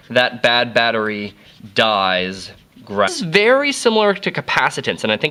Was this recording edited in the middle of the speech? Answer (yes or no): no